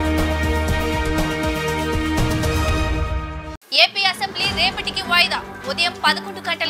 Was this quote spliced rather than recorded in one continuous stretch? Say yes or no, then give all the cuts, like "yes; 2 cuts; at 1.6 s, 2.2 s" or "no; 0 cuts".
no; 0 cuts